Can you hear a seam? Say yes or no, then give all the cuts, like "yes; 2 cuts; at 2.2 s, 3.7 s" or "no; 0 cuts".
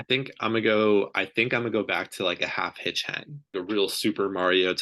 yes; 1 cut; at 3.5 s